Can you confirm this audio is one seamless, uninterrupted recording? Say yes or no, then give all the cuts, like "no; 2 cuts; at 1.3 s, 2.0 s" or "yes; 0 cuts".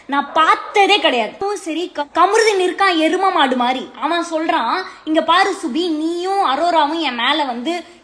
no; 1 cut; at 2.0 s